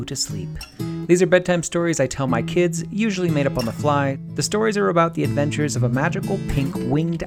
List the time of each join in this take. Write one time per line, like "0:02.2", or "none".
0:04.2